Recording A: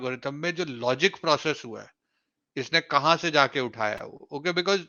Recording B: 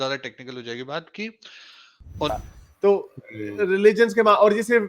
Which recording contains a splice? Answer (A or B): B